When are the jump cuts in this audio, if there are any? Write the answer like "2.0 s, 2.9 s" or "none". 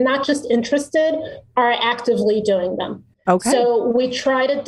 none